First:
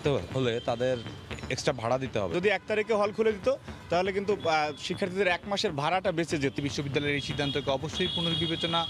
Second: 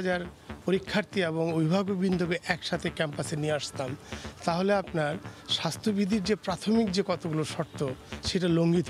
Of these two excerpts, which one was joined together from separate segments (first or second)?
first